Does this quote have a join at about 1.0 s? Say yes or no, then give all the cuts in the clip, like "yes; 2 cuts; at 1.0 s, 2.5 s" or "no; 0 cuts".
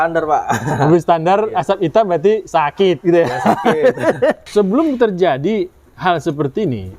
no; 1 cut; at 4.4 s